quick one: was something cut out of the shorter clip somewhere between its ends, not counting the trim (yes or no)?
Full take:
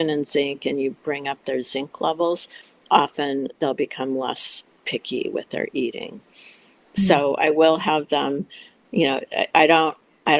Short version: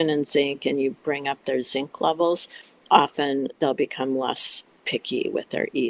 no